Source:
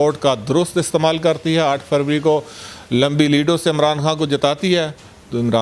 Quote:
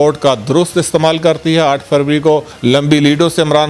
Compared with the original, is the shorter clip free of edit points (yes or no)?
no